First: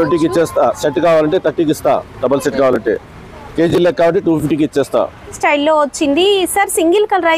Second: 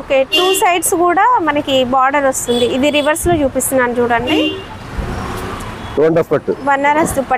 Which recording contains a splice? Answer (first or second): first